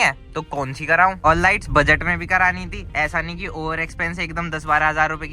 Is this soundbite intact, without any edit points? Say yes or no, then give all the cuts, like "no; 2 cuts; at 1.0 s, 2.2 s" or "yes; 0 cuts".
yes; 0 cuts